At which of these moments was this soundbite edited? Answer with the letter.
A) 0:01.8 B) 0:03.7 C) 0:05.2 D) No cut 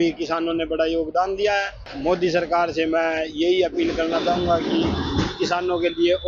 A